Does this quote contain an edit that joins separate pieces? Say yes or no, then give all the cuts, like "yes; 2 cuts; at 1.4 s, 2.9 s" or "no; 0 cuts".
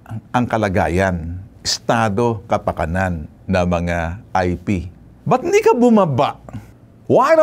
no; 0 cuts